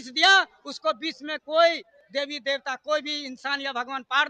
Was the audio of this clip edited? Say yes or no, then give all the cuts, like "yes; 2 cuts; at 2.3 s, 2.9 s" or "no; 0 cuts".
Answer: no; 0 cuts